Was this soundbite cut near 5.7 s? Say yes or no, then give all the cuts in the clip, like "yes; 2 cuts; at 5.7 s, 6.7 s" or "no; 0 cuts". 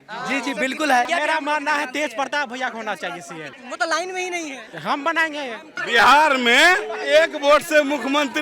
yes; 4 cuts; at 1.1 s, 3.5 s, 4.7 s, 5.7 s